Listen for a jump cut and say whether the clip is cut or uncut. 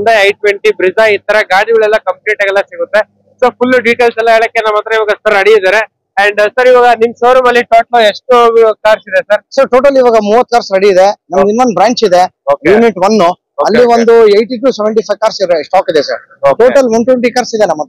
uncut